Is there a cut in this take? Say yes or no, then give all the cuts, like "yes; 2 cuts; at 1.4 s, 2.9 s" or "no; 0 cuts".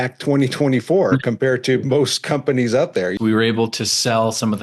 yes; 1 cut; at 3.1 s